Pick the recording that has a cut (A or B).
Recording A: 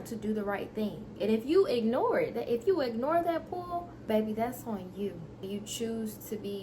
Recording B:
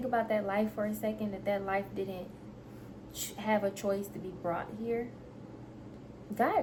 A